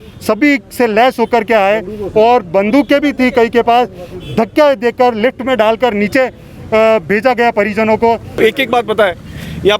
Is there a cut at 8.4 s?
yes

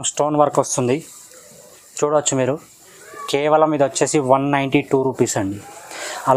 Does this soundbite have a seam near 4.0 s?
no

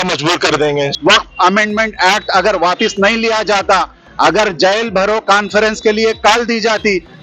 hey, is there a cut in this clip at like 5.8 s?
no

